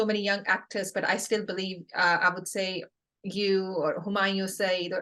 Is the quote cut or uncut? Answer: uncut